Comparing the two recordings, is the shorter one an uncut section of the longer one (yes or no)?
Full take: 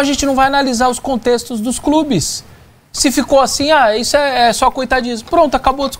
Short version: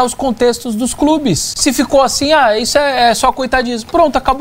no